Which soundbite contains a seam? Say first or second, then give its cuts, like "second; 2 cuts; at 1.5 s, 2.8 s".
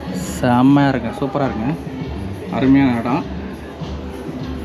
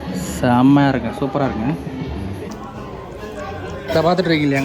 second; 1 cut; at 2.4 s